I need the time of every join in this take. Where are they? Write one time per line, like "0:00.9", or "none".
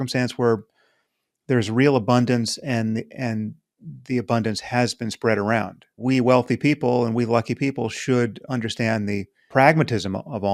0:06.0
0:09.4